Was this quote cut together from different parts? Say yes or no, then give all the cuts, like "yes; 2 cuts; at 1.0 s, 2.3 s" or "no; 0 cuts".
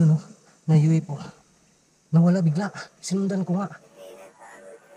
yes; 1 cut; at 3.8 s